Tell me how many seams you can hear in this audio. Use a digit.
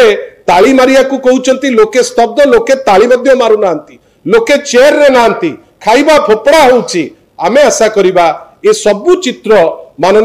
0